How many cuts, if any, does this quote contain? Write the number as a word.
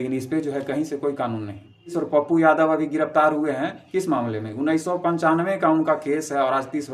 one